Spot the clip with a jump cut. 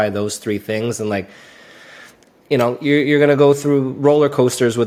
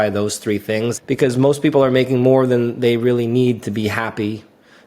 second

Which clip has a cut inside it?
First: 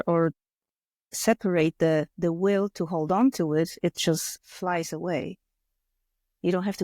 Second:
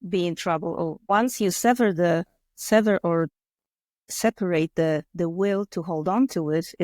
second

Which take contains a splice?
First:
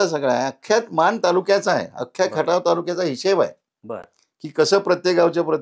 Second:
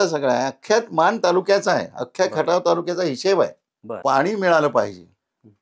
second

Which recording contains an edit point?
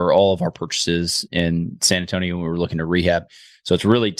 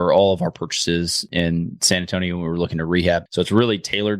second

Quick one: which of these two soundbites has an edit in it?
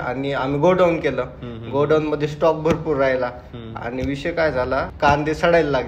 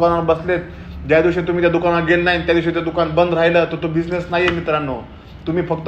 first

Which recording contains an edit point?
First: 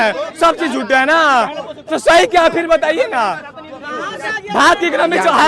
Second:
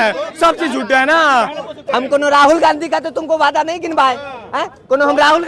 second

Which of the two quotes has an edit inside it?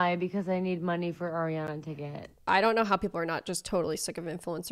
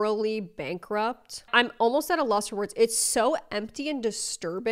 first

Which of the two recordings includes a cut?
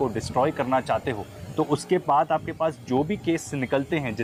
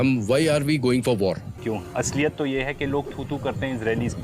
second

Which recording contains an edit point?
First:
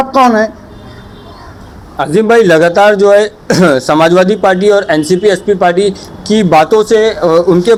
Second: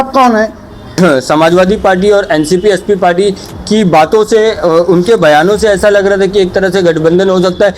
second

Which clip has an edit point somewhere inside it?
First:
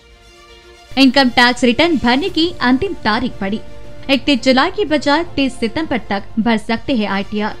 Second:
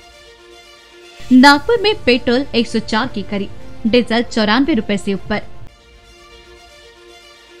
second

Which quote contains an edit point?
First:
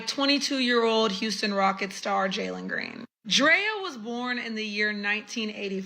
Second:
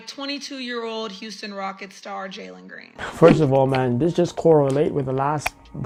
first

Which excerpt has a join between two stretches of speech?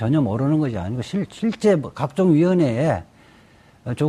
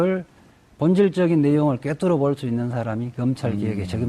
second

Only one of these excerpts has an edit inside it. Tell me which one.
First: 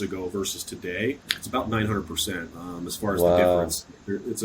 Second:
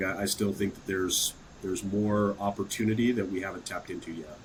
first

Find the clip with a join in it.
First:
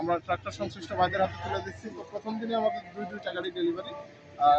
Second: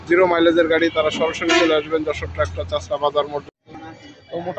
second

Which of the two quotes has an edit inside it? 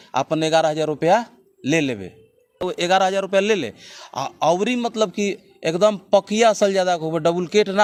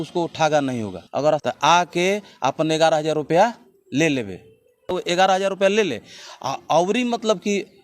second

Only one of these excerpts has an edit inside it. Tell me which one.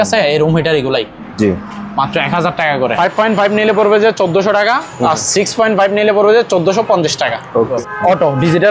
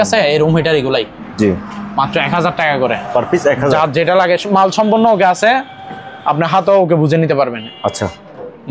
first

